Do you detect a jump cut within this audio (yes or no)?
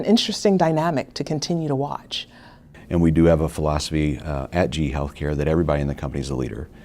yes